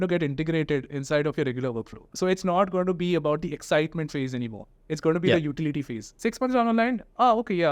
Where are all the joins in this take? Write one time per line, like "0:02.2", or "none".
0:06.0